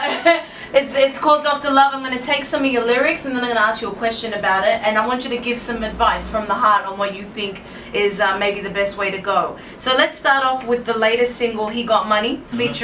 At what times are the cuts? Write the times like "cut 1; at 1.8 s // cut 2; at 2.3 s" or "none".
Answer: cut 1; at 7.1 s